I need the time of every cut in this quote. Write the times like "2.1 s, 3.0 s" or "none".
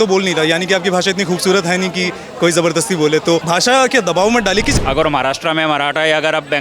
3.4 s, 4.7 s